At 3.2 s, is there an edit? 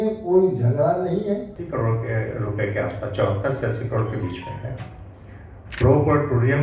no; 1 cut; at 1.6 s

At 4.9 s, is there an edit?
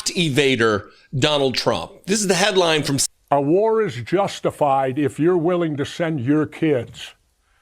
no; 1 cut; at 3.0 s

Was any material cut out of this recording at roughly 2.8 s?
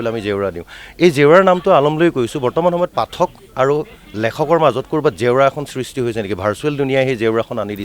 no; 0 cuts

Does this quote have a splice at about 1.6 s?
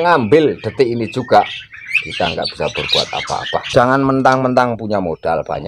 no; 1 cut; at 3.6 s

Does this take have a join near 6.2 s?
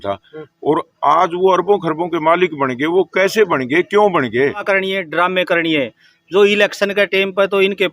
no; 1 cut; at 4.6 s

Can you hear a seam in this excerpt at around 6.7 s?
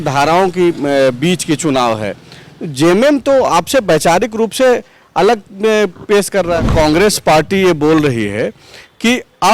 yes; 1 cut; at 6.7 s

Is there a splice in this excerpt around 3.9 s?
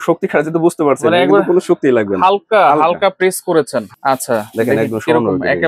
yes; 1 cut; at 3.9 s

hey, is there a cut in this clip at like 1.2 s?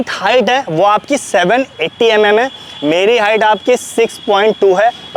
no; 0 cuts

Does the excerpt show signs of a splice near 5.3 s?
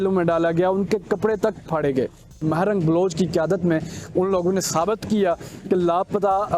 no; 1 cut; at 2.4 s

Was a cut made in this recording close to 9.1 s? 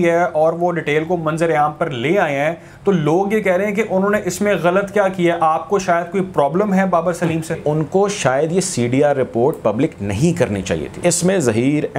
no; 2 cuts; at 7.6 s, 11.0 s

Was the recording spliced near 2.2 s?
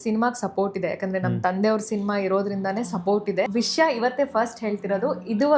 no; 1 cut; at 3.5 s

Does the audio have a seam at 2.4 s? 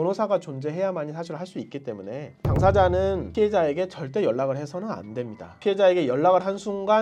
no; 1 cut; at 5.5 s

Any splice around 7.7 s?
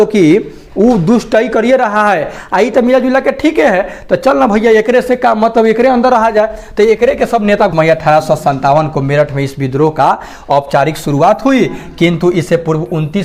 yes; 1 cut; at 7.7 s

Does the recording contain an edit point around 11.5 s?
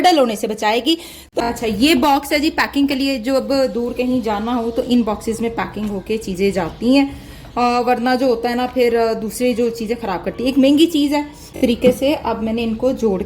yes; 2 cuts; at 1.2 s, 11.5 s

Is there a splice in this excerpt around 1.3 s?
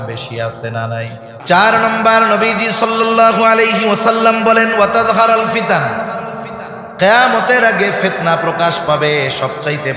yes; 1 cut; at 1.3 s

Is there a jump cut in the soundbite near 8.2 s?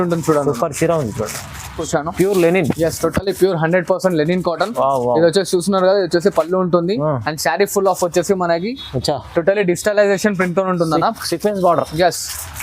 no; 1 cut; at 1.8 s

